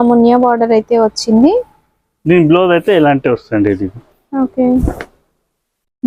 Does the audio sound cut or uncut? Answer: uncut